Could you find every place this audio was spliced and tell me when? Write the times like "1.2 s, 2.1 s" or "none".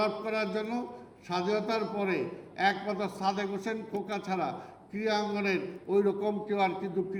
none